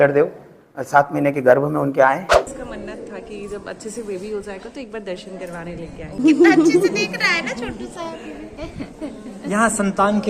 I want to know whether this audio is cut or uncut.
cut